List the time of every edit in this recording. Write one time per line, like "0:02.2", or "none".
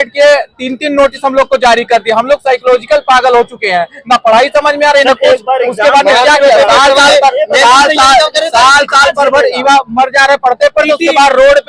none